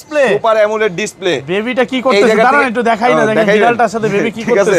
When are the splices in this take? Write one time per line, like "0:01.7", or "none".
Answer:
none